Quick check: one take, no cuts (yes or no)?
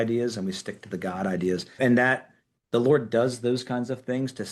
no